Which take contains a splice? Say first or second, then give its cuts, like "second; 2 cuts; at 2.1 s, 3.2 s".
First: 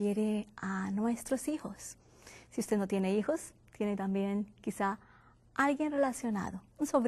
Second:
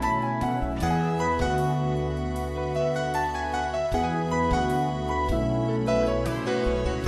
first; 1 cut; at 3.5 s